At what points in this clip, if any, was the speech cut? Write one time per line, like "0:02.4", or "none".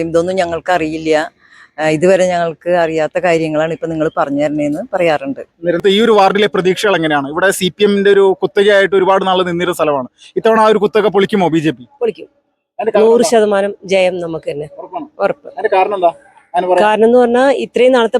0:05.8